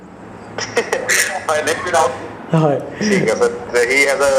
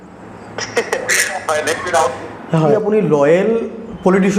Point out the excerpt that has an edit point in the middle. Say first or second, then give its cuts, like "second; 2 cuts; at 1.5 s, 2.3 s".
second; 1 cut; at 2.7 s